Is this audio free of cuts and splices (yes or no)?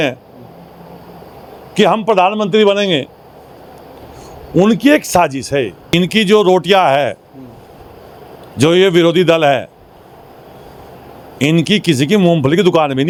yes